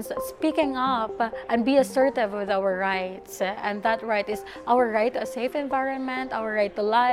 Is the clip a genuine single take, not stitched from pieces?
yes; 0 cuts

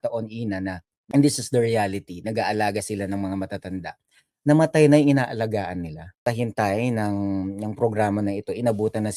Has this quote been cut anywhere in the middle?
yes; 2 cuts; at 0.9 s, 6.2 s

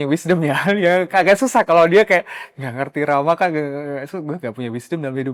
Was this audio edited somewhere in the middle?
no; 0 cuts

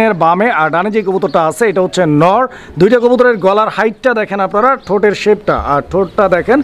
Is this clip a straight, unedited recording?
yes; 0 cuts

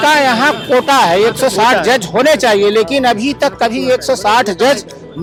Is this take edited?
no; 0 cuts

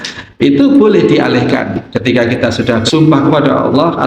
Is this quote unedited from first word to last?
no; 2 cuts; at 1.8 s, 2.9 s

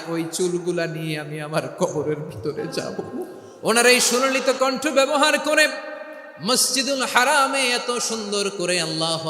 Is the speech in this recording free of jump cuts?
no; 1 cut; at 3.4 s

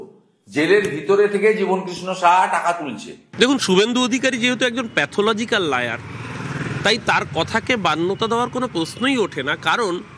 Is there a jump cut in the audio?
yes; 1 cut; at 3.3 s

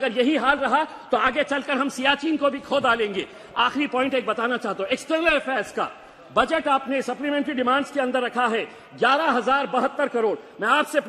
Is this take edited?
no; 0 cuts

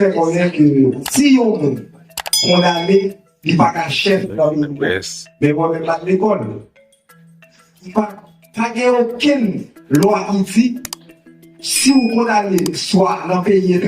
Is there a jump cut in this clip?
yes; 2 cuts; at 1.0 s, 3.3 s

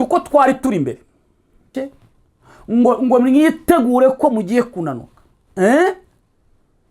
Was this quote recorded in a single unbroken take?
no; 1 cut; at 1.7 s

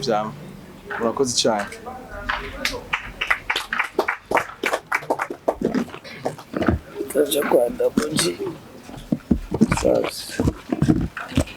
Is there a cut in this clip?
no; 0 cuts

